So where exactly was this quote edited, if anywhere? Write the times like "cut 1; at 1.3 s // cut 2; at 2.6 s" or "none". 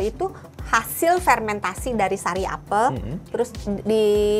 cut 1; at 3.2 s